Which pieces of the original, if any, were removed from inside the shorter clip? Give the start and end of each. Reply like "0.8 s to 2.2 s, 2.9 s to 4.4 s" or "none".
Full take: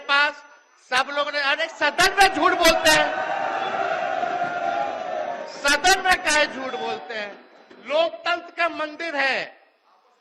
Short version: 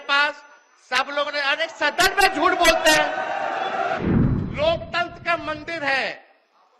4.0 s to 7.3 s